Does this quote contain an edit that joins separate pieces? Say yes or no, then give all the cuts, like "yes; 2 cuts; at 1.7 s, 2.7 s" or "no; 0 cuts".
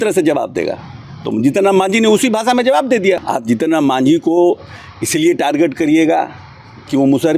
yes; 1 cut; at 3.3 s